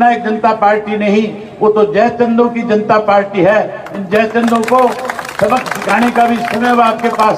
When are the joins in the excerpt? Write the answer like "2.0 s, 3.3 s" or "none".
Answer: none